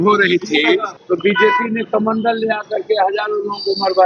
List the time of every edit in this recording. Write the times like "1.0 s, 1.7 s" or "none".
0.9 s